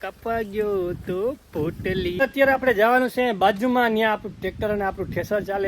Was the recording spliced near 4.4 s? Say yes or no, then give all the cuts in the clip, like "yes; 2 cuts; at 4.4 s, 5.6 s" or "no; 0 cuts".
no; 1 cut; at 2.2 s